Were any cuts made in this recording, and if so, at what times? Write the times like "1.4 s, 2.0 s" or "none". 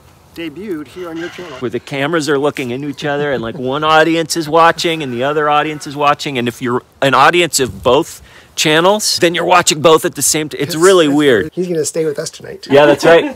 1.6 s, 11.5 s